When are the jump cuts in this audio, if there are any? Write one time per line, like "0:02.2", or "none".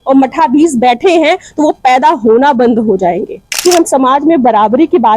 0:03.5